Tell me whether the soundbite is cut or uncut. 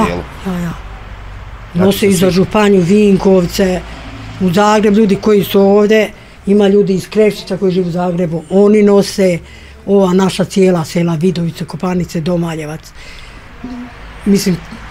uncut